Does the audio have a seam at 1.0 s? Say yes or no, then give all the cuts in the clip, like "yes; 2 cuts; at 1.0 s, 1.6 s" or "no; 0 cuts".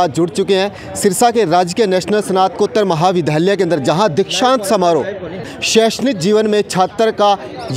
no; 1 cut; at 5.5 s